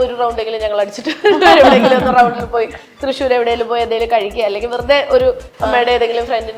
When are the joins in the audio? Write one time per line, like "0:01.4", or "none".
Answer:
none